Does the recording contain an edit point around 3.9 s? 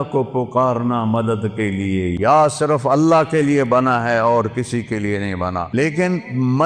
no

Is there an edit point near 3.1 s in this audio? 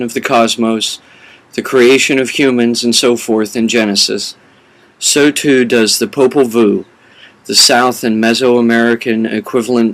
yes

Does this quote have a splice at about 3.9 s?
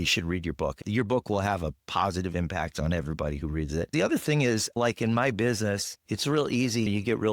yes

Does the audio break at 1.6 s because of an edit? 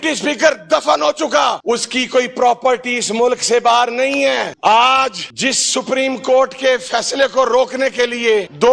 yes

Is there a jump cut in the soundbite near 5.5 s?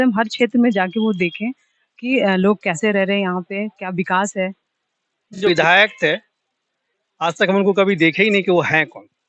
yes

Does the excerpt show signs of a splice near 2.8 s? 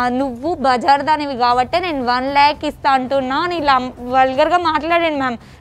no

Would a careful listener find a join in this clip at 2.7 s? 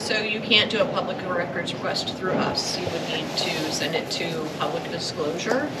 no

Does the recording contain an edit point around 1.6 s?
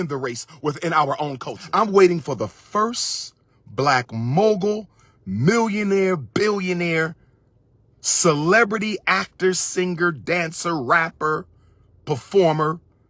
yes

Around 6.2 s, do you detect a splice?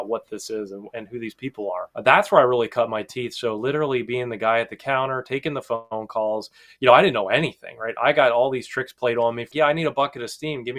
no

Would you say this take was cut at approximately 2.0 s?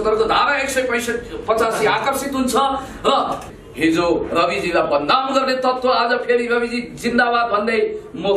no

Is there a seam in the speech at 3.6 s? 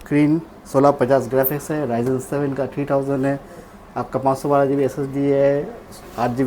no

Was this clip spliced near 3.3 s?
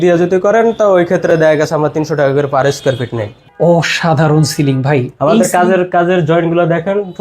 yes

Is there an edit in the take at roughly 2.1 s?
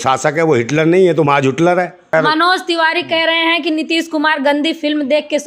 yes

